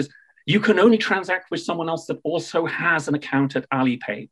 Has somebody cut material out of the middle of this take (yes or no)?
no